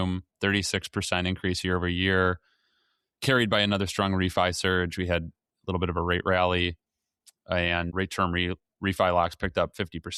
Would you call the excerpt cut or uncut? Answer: uncut